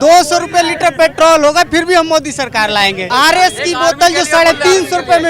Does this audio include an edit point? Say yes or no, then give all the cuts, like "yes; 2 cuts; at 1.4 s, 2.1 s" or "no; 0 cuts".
yes; 1 cut; at 3.0 s